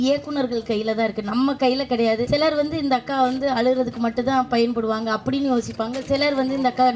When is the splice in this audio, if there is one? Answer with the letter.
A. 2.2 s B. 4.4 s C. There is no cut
A